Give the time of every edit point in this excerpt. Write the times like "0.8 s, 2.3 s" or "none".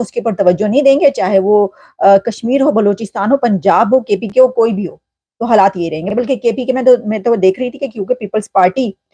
none